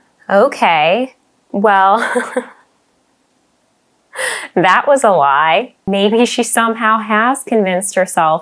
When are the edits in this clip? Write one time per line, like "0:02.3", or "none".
0:05.9